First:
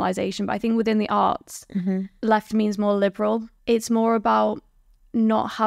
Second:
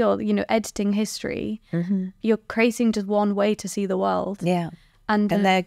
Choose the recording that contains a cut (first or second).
first